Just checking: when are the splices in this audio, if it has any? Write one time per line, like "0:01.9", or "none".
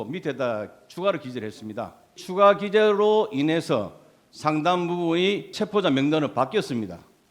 0:02.2
0:05.5